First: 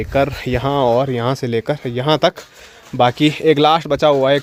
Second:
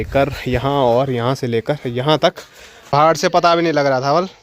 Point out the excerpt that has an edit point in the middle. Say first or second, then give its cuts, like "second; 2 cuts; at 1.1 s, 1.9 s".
second; 1 cut; at 2.7 s